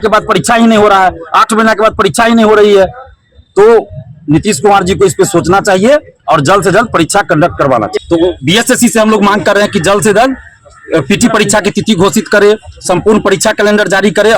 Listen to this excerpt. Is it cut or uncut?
cut